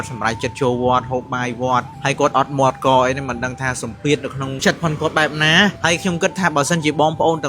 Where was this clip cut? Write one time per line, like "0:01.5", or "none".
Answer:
0:04.6